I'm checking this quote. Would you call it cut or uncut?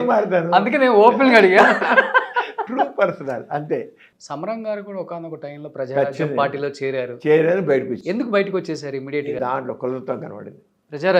cut